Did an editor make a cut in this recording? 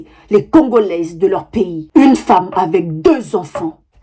no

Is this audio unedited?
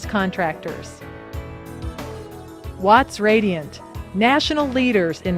no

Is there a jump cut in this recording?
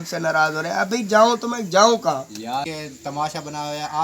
yes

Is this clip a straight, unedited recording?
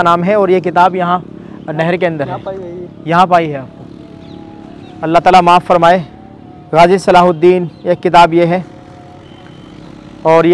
yes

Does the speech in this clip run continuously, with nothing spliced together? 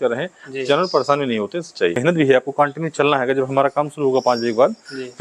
no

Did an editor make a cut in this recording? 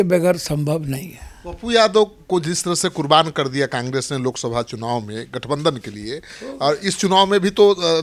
no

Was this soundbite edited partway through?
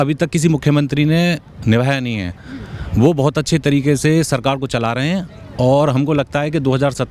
no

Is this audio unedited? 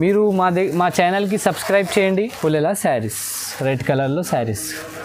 no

